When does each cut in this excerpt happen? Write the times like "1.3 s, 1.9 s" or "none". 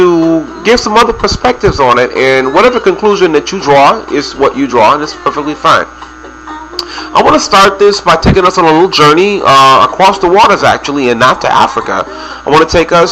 1.1 s

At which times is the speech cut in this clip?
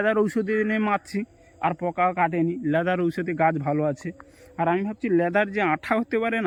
none

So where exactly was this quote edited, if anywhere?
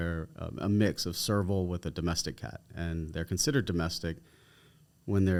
none

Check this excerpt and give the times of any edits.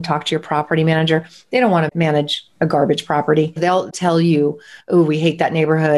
3.6 s

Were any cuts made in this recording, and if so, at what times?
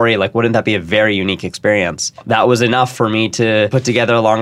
2.1 s, 3.7 s

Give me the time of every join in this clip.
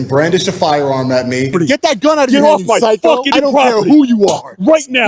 3.3 s

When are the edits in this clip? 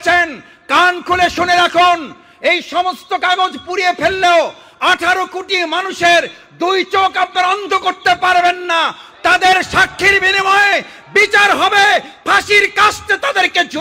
none

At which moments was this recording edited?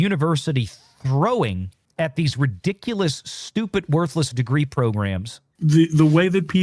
5.4 s

